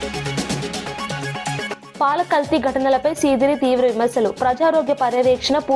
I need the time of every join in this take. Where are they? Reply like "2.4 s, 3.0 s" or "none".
1.0 s, 1.9 s